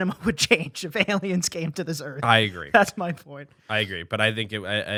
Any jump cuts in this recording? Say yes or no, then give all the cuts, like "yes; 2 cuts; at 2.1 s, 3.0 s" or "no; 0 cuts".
no; 0 cuts